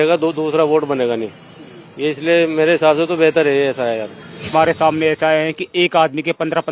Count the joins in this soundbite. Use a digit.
1